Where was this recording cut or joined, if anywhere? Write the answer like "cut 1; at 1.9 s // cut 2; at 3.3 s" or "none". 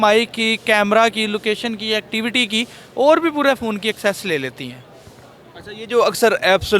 none